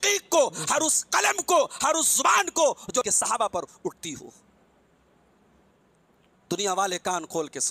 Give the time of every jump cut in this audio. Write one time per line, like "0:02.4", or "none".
0:03.0